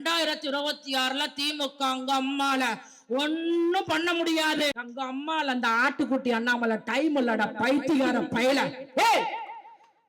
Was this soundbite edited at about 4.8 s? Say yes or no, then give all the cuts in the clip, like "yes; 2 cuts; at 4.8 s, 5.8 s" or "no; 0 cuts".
yes; 1 cut; at 4.8 s